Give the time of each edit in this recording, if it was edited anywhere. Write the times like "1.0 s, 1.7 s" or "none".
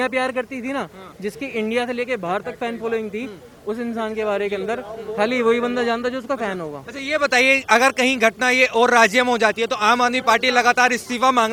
none